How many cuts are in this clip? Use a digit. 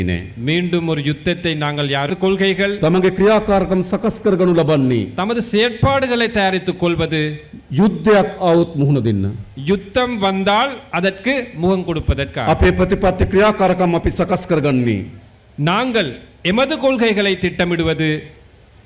1